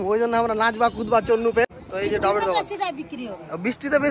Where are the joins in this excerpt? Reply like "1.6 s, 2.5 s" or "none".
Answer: 1.6 s